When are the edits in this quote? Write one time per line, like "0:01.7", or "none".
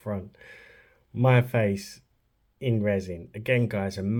none